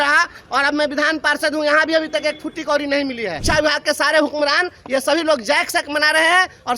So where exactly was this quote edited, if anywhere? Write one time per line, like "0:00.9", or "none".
0:03.4